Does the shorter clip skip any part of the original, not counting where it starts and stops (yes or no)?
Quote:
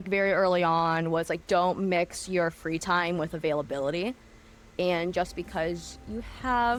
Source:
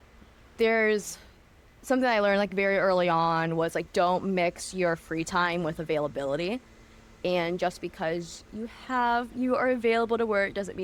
no